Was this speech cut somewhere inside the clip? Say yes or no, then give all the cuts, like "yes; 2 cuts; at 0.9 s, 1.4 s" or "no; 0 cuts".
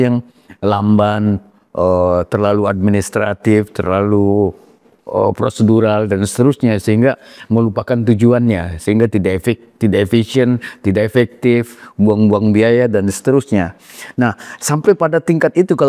no; 0 cuts